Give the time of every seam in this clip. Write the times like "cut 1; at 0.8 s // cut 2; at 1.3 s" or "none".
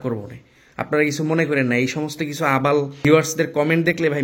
cut 1; at 3.0 s